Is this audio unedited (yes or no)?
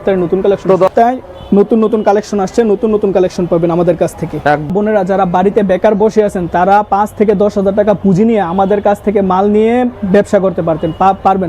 no